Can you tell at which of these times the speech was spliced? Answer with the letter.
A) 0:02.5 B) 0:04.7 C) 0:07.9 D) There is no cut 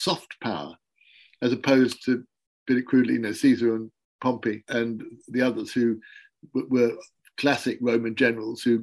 B